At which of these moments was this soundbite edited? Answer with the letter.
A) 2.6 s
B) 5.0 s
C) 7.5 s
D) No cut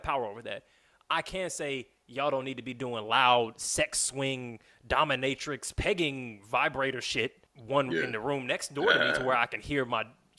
C